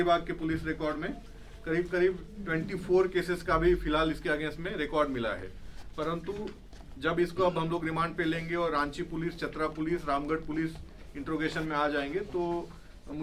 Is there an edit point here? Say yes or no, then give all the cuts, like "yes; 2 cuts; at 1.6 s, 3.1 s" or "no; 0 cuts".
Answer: no; 0 cuts